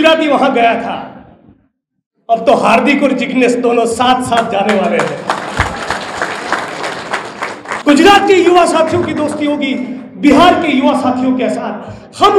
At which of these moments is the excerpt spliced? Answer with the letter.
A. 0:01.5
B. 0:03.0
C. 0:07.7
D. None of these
C